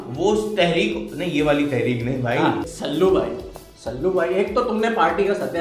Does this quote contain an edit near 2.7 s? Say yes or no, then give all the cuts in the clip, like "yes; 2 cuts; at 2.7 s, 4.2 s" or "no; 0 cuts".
yes; 1 cut; at 2.7 s